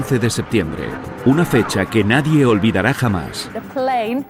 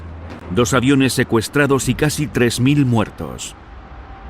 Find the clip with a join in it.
second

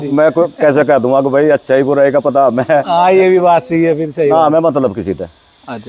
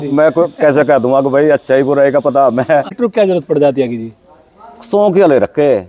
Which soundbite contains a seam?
second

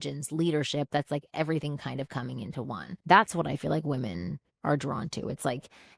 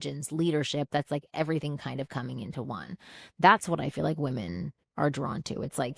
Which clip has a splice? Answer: first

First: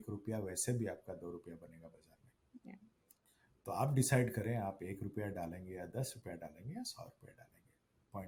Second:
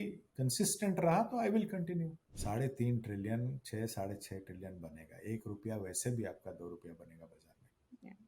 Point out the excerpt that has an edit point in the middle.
second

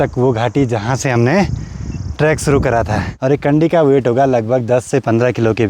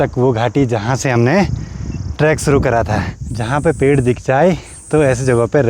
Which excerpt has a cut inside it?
first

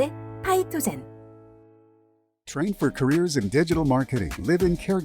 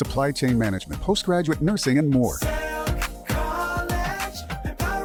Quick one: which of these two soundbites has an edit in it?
first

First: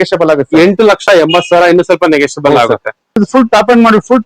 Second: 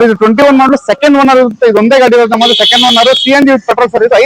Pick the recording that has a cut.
first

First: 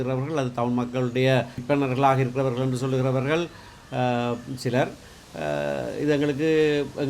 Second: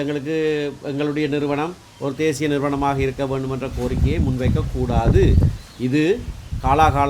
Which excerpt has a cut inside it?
first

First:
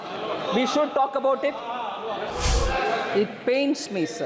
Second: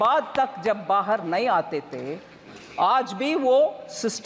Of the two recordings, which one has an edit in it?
first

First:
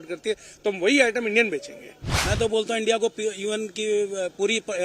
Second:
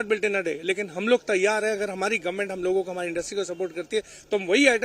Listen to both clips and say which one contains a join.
first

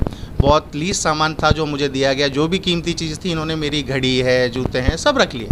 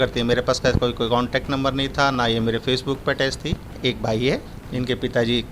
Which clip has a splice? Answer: second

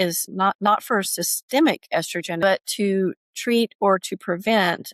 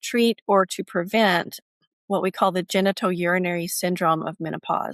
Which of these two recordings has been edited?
first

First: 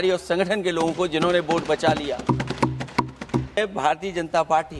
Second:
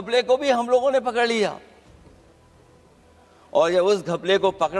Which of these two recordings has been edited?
first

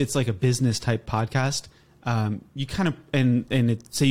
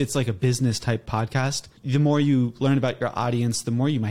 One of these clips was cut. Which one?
second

